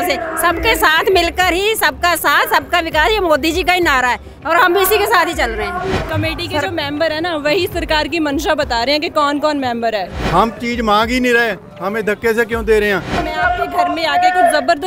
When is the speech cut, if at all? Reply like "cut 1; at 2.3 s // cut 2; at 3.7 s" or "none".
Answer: cut 1; at 6.0 s // cut 2; at 10.2 s // cut 3; at 13.3 s